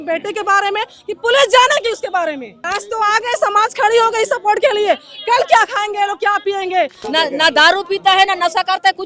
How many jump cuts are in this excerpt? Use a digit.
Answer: 2